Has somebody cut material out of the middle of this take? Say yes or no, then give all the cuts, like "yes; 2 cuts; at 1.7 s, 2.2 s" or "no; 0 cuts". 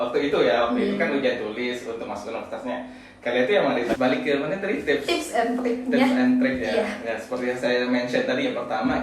yes; 1 cut; at 3.9 s